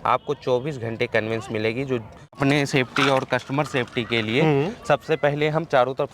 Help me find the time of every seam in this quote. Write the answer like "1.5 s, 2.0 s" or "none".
2.4 s